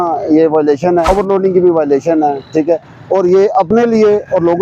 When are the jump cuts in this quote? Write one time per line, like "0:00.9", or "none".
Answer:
0:01.1